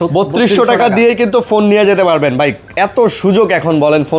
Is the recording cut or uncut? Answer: uncut